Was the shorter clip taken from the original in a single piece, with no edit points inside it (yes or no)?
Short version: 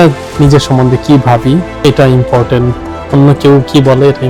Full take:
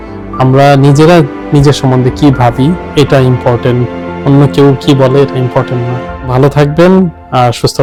yes